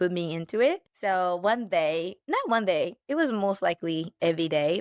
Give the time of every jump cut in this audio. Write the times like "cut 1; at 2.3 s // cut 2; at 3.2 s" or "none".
cut 1; at 0.9 s // cut 2; at 2.2 s // cut 3; at 3.0 s